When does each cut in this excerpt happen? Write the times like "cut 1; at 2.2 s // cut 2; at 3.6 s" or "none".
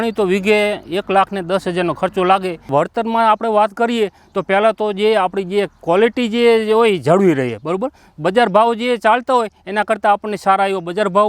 cut 1; at 2.7 s

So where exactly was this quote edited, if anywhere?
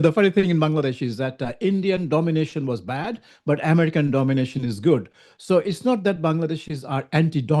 none

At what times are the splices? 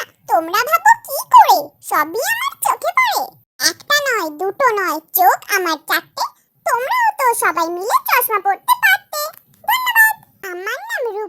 cut 1; at 10.3 s

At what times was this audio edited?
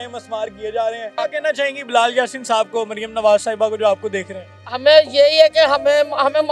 cut 1; at 1.1 s

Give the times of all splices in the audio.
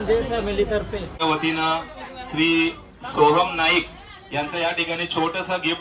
cut 1; at 1.1 s

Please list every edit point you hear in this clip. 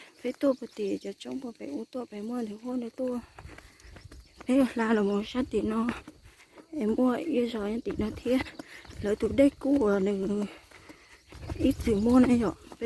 none

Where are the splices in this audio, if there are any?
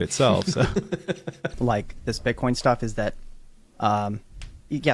cut 1; at 1.5 s

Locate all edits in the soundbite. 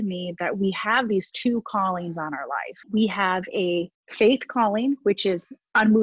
cut 1; at 2.7 s // cut 2; at 4.0 s

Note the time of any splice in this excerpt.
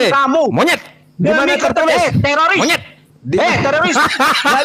none

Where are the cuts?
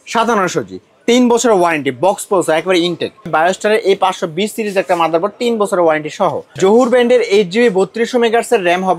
cut 1; at 3.3 s // cut 2; at 6.4 s

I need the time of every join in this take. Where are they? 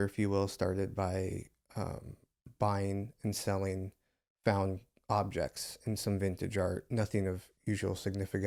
none

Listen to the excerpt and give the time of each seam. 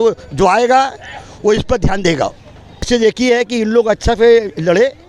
cut 1; at 2.9 s

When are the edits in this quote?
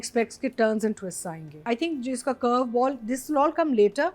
cut 1; at 1.6 s

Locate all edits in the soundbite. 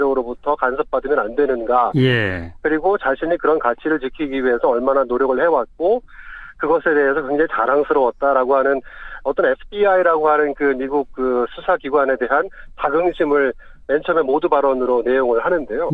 cut 1; at 11.7 s

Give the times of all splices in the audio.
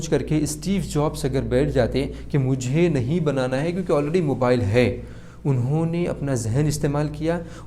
none

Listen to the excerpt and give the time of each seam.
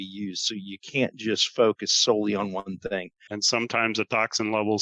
cut 1; at 3.3 s

